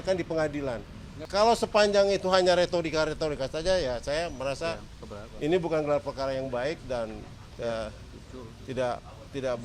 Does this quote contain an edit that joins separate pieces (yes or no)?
yes